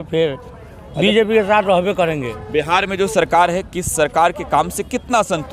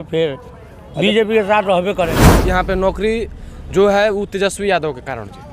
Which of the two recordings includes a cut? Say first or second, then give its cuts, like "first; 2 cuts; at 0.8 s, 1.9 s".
second; 1 cut; at 2.4 s